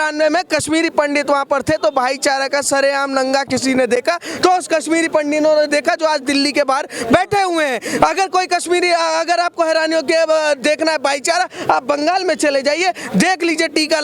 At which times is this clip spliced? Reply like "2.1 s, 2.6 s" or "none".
none